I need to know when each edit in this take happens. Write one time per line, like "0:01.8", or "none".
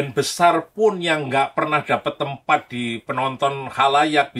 none